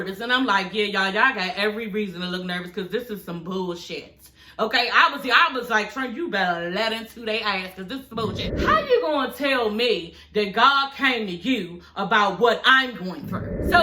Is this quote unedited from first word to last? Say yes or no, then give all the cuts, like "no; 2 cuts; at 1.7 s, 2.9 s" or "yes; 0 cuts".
no; 1 cut; at 8.5 s